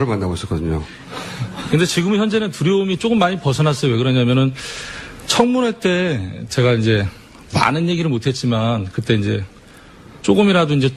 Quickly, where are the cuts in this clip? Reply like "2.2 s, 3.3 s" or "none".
none